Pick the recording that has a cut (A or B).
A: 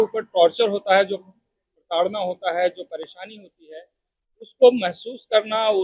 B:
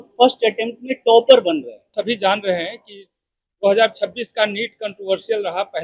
B